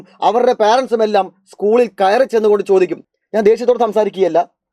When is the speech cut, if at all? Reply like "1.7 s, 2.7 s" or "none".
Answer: 3.1 s